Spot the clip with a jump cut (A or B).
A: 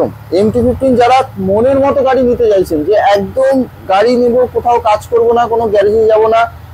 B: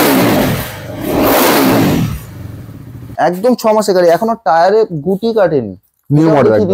B